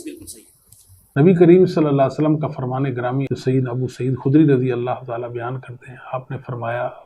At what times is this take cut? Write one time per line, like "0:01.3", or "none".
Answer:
0:01.0